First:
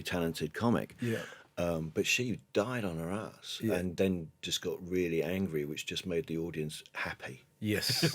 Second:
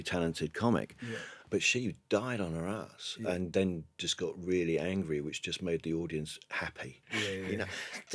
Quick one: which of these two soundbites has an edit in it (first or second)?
second